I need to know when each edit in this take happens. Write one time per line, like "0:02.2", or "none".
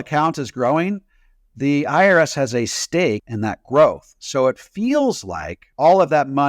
0:03.3